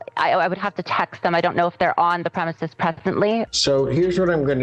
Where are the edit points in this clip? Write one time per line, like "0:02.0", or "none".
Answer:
0:03.5